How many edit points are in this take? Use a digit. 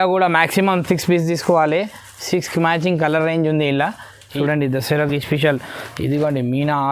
1